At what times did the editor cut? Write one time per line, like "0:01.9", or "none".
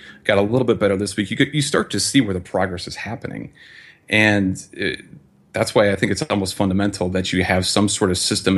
none